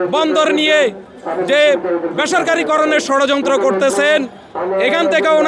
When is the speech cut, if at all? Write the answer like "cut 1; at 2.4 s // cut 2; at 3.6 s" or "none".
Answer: none